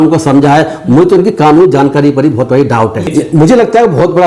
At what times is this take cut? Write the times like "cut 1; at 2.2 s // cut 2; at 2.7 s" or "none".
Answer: cut 1; at 3.0 s